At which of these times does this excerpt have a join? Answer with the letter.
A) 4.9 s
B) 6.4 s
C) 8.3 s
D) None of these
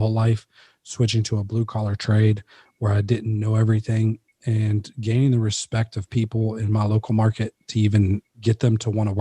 C